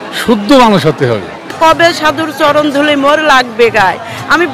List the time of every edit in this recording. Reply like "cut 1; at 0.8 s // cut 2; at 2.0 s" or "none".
cut 1; at 1.6 s